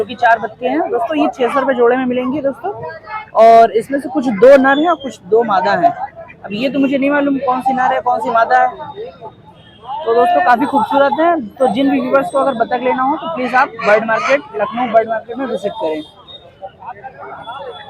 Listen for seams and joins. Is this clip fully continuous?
yes; 0 cuts

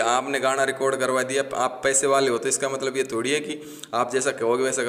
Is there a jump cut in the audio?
no; 0 cuts

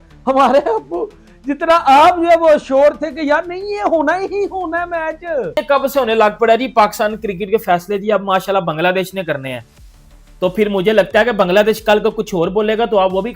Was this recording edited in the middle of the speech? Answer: yes; 1 cut; at 5.5 s

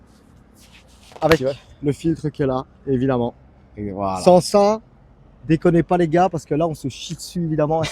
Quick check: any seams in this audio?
no; 0 cuts

